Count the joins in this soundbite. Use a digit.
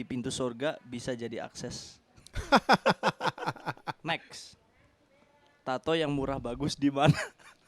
1